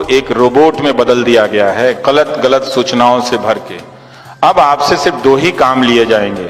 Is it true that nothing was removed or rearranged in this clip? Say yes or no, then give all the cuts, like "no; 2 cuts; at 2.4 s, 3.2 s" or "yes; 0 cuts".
yes; 0 cuts